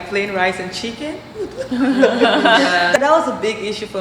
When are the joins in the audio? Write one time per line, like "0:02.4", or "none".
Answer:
0:03.0